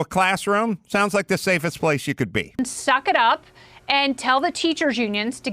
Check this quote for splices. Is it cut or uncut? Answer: cut